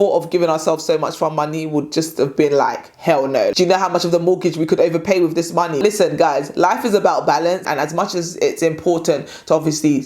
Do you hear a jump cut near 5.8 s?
yes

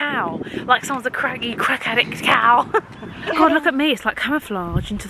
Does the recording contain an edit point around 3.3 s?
yes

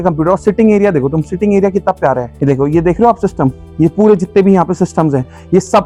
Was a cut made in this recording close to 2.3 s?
no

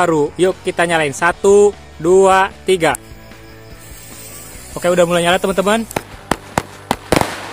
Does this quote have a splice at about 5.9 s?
yes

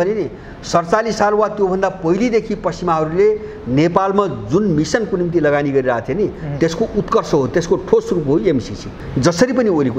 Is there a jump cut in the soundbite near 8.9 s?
yes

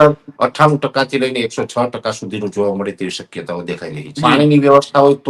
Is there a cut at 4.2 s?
yes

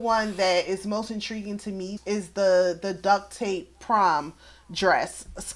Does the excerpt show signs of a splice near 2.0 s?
yes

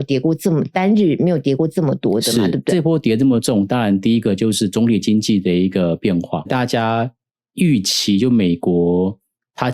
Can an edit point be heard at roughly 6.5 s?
yes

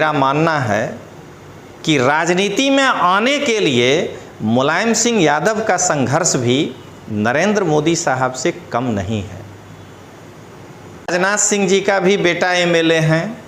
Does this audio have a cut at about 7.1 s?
no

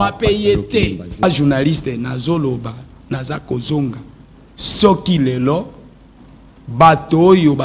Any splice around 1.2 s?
yes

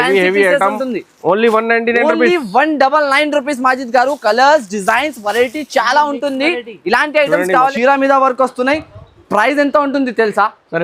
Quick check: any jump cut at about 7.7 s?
yes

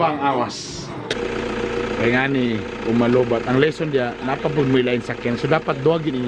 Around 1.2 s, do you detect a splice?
yes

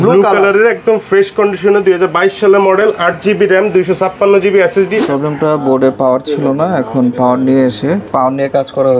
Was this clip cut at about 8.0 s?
no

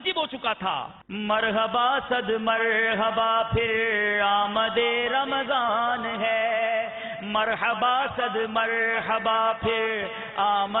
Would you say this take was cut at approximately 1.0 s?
yes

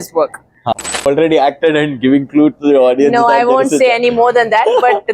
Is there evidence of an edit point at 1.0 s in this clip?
yes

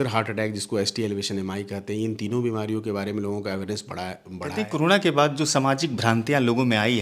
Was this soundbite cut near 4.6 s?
yes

